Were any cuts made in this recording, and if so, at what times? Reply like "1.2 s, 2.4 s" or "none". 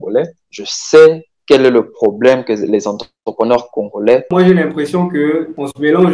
4.3 s